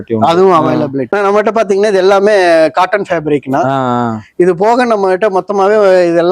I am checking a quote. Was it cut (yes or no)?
yes